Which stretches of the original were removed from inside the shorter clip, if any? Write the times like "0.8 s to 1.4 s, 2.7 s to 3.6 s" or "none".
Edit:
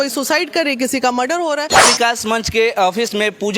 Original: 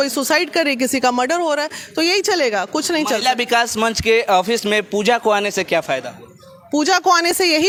1.7 s to 3.2 s